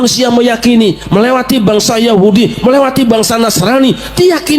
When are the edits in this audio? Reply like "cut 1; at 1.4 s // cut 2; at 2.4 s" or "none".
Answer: none

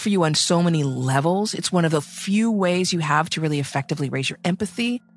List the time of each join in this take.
none

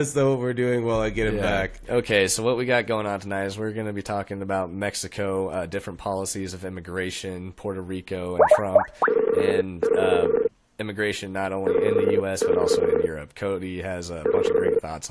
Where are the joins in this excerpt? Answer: cut 1; at 3.0 s

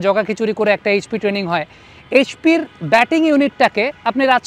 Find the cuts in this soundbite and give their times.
none

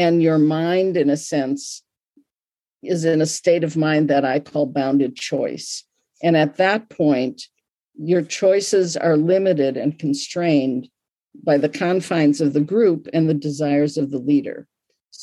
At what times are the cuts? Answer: none

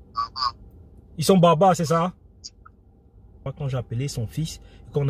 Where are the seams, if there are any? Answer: cut 1; at 3.5 s

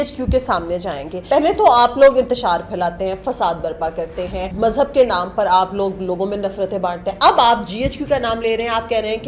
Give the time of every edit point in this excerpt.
cut 1; at 1.1 s // cut 2; at 4.5 s

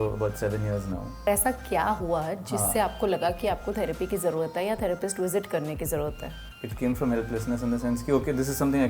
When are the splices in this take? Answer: cut 1; at 1.3 s // cut 2; at 6.8 s

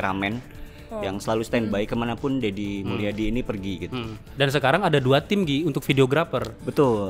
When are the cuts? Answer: cut 1; at 4.2 s

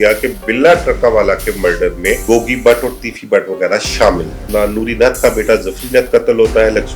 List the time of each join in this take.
cut 1; at 2.2 s // cut 2; at 4.4 s

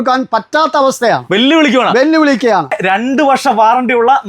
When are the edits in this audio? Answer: cut 1; at 2.8 s

